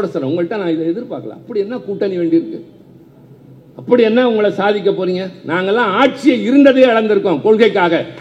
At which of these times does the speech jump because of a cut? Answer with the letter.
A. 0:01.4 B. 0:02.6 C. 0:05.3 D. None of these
D